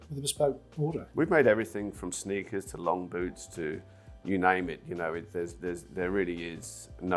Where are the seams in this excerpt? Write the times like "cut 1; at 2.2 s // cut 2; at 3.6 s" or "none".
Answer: none